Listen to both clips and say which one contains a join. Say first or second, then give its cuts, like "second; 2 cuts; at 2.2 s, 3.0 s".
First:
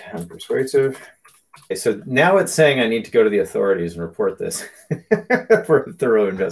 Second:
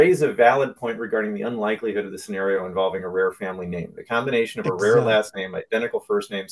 first; 1 cut; at 1.8 s